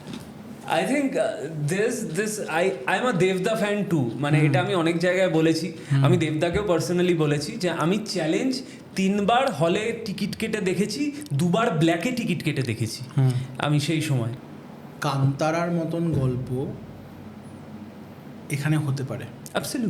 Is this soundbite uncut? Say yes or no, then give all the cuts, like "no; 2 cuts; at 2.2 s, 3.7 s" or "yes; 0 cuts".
no; 1 cut; at 14.4 s